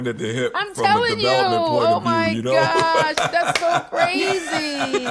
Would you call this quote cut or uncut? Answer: uncut